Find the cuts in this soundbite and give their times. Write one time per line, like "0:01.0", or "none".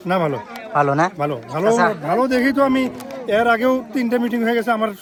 none